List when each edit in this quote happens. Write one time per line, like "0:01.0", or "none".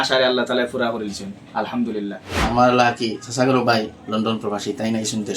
0:02.3